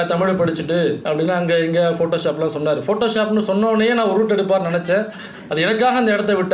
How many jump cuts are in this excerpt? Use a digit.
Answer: 1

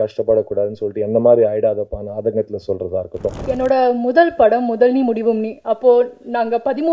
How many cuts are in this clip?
1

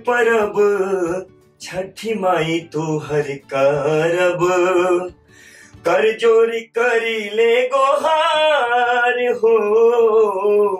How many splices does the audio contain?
0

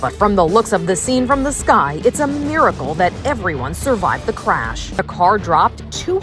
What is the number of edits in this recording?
1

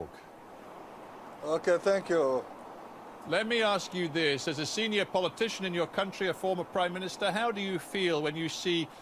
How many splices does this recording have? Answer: 0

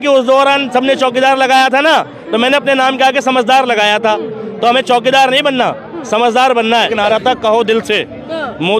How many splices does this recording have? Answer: 1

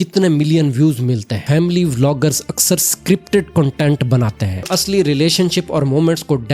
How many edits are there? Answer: 2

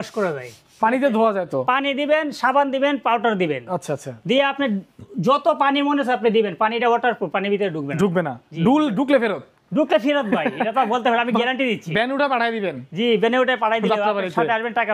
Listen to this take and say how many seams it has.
0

